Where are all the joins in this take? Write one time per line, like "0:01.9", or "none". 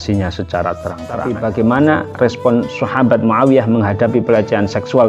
0:01.3